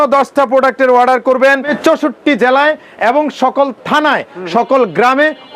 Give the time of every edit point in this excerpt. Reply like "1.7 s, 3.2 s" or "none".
1.7 s